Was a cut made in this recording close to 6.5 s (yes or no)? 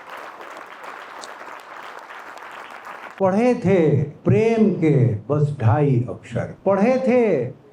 yes